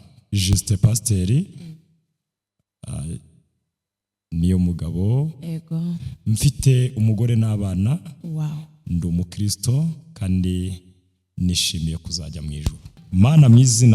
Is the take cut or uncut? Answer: cut